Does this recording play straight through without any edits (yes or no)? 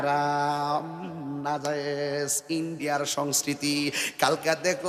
yes